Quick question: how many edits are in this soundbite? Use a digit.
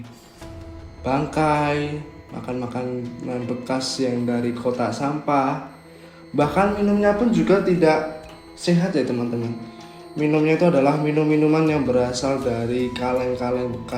0